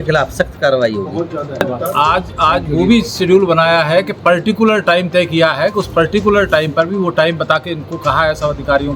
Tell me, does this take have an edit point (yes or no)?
yes